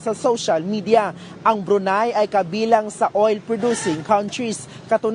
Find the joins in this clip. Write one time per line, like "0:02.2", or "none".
none